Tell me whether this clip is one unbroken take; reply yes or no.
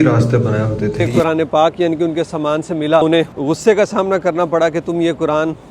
no